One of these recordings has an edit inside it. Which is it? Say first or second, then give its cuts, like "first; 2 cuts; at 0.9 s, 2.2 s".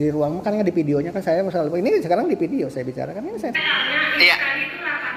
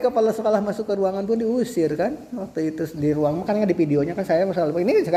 first; 1 cut; at 3.6 s